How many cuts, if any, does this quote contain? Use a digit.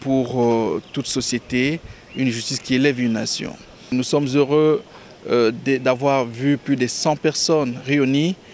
1